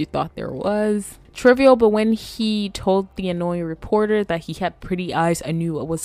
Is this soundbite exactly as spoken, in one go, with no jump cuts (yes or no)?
yes